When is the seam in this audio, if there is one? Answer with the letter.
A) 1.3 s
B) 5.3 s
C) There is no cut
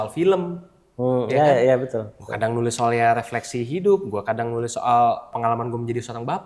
B